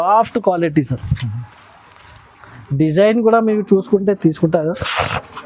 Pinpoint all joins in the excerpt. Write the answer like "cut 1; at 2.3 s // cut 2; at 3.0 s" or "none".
none